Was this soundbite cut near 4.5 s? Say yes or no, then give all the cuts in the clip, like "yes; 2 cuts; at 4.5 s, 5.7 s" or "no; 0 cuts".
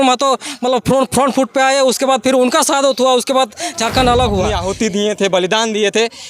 yes; 1 cut; at 4.5 s